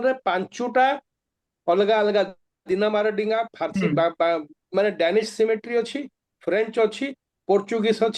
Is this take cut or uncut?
uncut